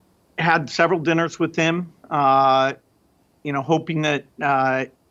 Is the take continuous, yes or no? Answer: yes